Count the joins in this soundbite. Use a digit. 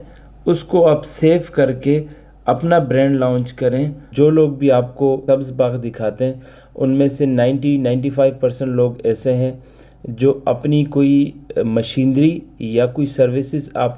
2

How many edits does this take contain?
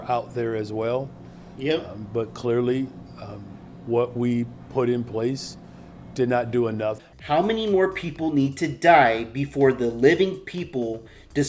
1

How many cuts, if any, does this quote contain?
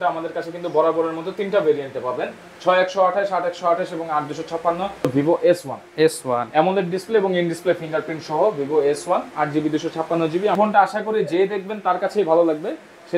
2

